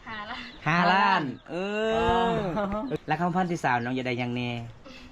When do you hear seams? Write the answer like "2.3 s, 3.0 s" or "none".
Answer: 2.9 s

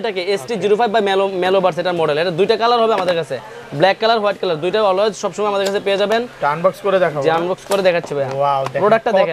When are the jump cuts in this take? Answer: none

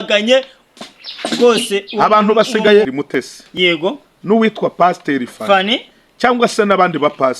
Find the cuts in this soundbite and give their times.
3.0 s

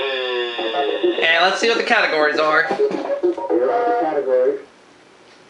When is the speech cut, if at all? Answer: 3.4 s

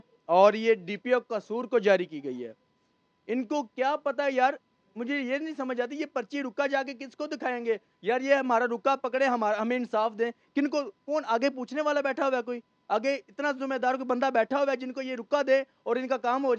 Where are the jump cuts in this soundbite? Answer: none

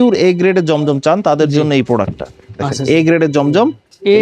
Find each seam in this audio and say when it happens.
none

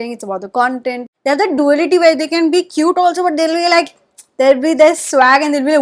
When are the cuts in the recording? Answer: 1.1 s

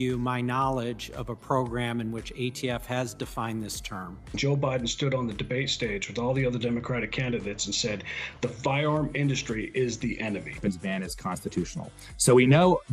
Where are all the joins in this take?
4.2 s, 10.5 s

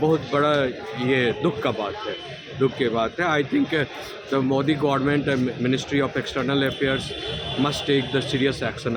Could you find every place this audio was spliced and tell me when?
none

